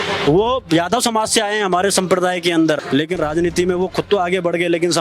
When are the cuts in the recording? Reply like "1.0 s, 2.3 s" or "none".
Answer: 2.8 s